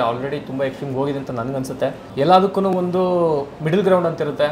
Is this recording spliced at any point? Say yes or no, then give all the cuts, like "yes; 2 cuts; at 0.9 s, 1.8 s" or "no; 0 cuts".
yes; 2 cuts; at 2.0 s, 3.5 s